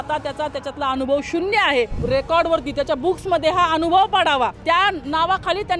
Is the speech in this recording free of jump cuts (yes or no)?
no